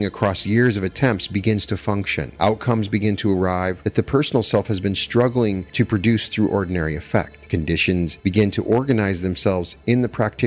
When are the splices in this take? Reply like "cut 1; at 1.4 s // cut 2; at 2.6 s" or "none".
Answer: cut 1; at 2.2 s // cut 2; at 3.8 s // cut 3; at 5.6 s // cut 4; at 7.9 s